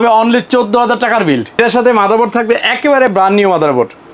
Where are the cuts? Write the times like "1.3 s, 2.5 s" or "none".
1.5 s